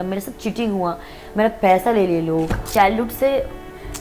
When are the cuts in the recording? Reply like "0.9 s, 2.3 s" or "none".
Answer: 2.7 s